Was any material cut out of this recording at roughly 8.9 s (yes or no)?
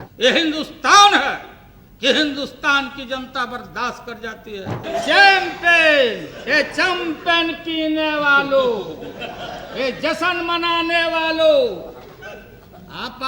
no